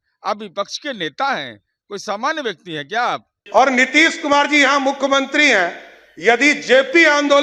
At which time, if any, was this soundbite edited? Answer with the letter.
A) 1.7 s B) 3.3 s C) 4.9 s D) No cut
B